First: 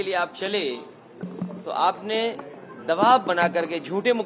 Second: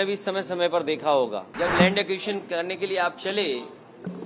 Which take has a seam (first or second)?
second